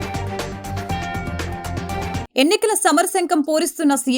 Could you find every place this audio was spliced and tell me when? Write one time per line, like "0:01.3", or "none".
0:02.2